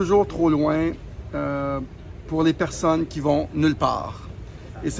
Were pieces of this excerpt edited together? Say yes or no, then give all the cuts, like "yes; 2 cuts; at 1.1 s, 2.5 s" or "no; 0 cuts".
no; 0 cuts